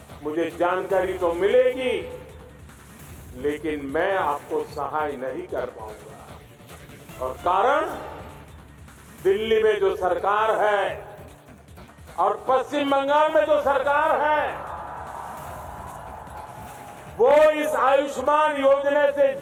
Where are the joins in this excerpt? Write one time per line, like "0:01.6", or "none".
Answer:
none